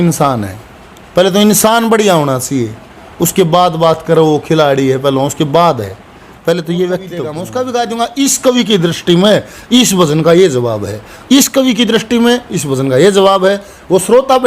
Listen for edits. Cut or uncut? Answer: cut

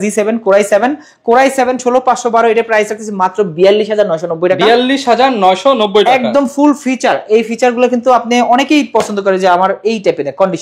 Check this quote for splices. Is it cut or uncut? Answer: uncut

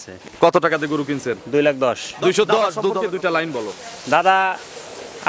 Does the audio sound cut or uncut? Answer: cut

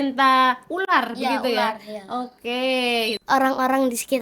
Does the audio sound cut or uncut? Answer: cut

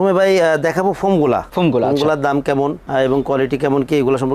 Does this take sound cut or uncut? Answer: uncut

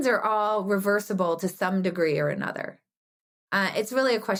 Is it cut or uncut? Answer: uncut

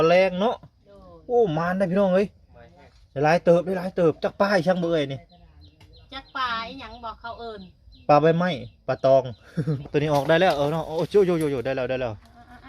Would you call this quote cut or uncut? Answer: cut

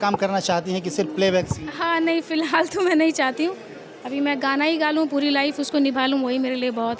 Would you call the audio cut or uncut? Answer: uncut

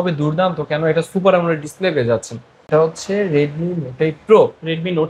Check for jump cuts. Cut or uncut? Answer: cut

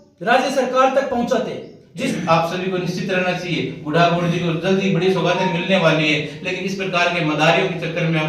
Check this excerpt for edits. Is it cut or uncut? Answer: cut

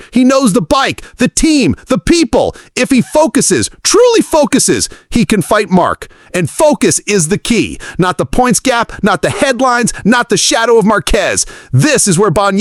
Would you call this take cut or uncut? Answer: uncut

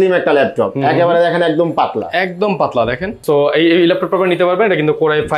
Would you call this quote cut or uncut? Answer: cut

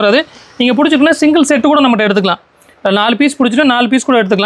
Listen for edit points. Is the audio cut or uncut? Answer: uncut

